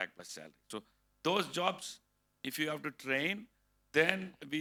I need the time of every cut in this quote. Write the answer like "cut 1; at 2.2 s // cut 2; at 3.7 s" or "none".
none